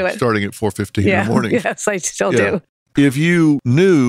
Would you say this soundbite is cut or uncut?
cut